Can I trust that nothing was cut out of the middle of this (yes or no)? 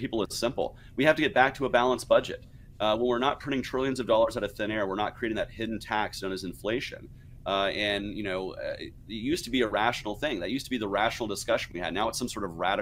no